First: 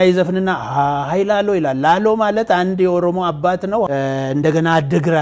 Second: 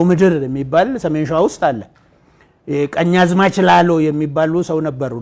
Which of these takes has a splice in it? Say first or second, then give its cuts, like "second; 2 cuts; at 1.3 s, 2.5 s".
first; 1 cut; at 3.9 s